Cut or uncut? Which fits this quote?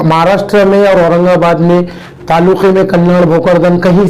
uncut